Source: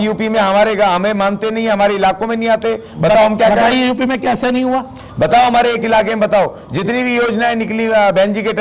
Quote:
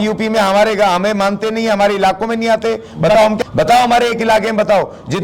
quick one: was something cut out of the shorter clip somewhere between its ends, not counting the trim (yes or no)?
yes